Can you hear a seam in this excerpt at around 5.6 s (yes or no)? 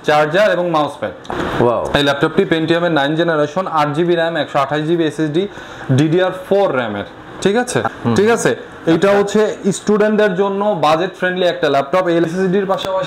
no